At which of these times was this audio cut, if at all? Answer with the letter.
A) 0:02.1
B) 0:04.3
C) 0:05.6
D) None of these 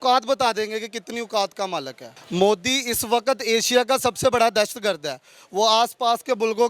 A